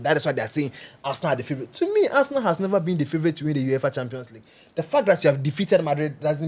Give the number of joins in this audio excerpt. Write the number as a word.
zero